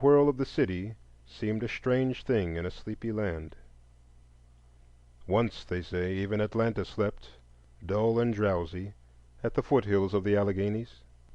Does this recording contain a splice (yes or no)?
yes